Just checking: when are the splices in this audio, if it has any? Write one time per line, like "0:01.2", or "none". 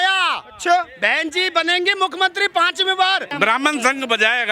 0:03.3